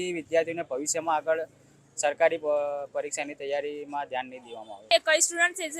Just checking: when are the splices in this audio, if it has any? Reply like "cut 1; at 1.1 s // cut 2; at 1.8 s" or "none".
cut 1; at 4.9 s